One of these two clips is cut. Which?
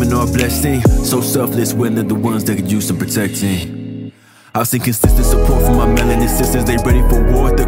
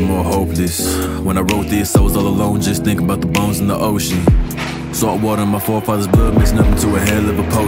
second; 1 cut; at 1.0 s

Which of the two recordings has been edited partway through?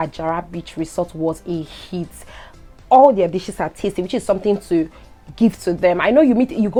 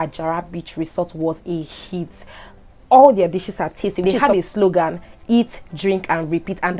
second; 1 cut; at 4.0 s

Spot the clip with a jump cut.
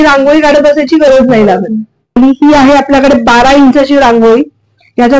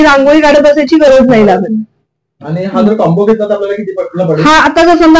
first; 1 cut; at 2.2 s

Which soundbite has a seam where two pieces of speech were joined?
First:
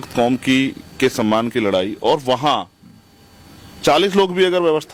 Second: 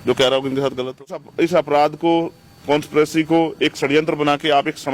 second; 1 cut; at 1.3 s

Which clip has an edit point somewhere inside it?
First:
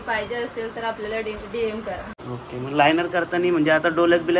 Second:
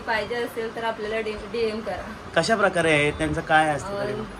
first; 1 cut; at 2.1 s

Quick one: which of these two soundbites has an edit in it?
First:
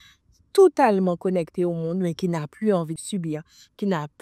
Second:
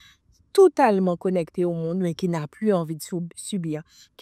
first; 1 cut; at 3.0 s

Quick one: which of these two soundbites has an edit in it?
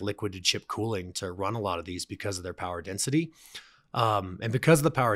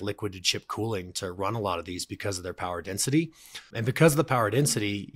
second; 1 cut; at 3.7 s

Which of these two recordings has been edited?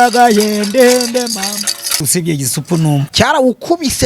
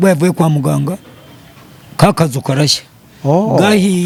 first; 2 cuts; at 2.1 s, 3.1 s

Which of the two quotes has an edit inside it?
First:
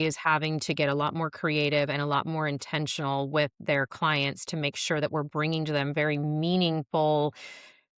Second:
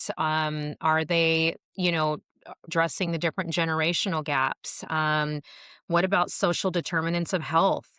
second; 1 cut; at 2.7 s

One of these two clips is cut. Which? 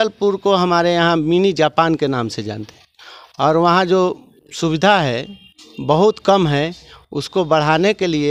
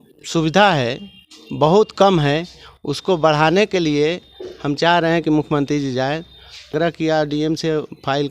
second; 1 cut; at 6.7 s

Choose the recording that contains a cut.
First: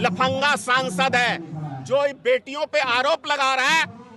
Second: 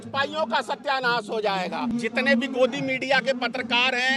second; 1 cut; at 1.9 s

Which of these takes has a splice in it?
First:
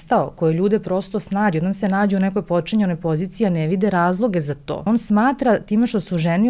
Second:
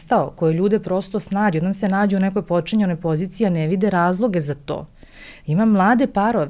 first; 1 cut; at 4.8 s

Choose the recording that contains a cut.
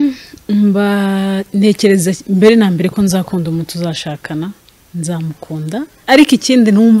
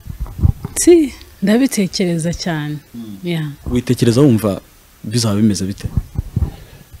first; 1 cut; at 6.0 s

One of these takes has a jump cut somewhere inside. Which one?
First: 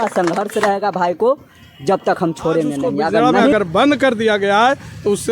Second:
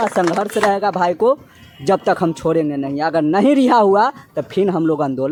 first; 1 cut; at 3.5 s

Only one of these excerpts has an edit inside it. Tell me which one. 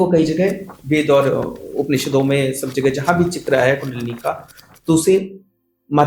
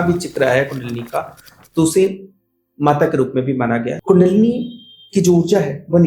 second; 1 cut; at 3.9 s

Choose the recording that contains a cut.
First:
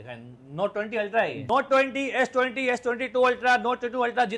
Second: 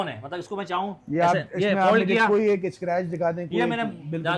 first; 1 cut; at 1.4 s

